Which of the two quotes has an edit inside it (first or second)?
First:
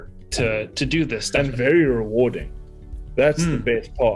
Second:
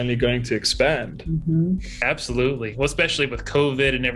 first